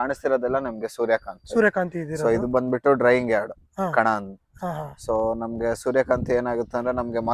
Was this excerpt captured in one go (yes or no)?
yes